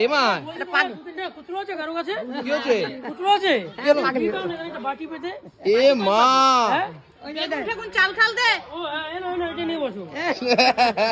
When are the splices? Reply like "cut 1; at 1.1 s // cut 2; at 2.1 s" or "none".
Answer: none